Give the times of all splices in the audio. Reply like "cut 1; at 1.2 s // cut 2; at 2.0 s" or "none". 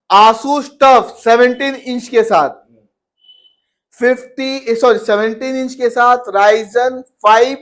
none